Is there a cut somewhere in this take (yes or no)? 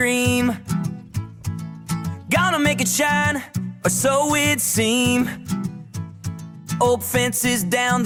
no